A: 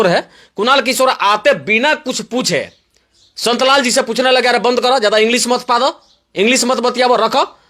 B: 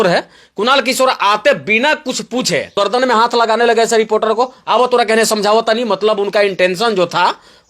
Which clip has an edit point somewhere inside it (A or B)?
B